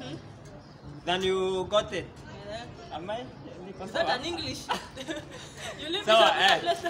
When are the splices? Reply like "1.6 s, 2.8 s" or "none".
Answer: none